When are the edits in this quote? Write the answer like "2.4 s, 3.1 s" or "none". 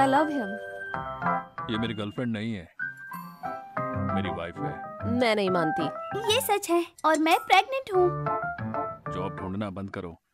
1.5 s, 4.0 s, 4.9 s, 6.1 s, 9.0 s